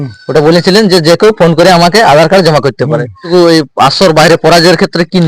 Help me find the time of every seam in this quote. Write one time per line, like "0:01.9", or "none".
0:03.2